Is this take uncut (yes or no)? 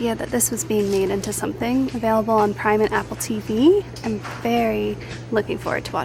yes